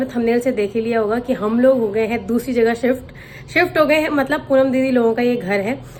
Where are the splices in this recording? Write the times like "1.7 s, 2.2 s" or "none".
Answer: none

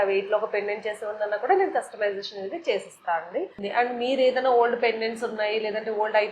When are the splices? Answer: 3.6 s

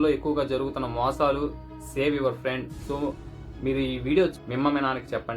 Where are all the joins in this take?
4.4 s

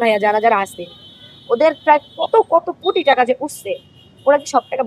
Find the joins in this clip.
none

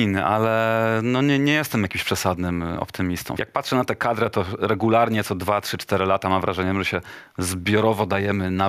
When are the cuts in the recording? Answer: 3.4 s

